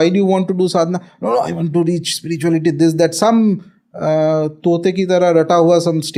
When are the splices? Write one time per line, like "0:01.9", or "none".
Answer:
none